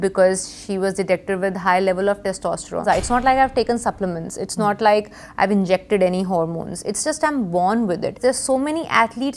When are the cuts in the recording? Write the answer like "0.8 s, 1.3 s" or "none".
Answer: 2.8 s, 8.2 s